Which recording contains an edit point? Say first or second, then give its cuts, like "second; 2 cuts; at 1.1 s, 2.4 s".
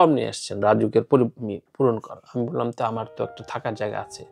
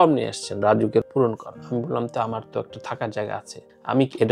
second; 1 cut; at 1.1 s